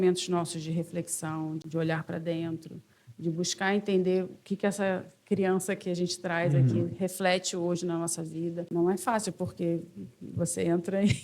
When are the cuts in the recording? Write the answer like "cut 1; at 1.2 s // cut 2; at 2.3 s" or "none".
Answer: cut 1; at 1.6 s // cut 2; at 8.7 s